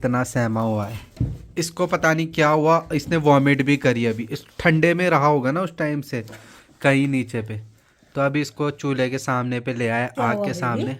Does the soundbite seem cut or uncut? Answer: uncut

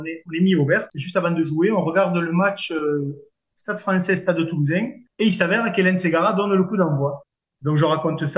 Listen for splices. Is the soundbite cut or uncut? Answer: cut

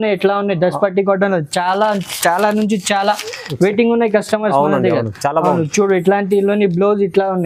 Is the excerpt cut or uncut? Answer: uncut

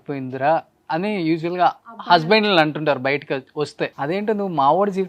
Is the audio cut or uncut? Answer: cut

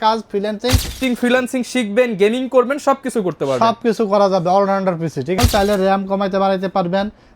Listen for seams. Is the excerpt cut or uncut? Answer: cut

